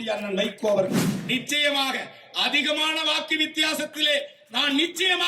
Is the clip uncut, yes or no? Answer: no